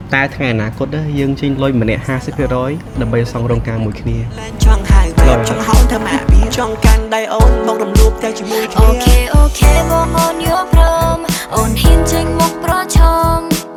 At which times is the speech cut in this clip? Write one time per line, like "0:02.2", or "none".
none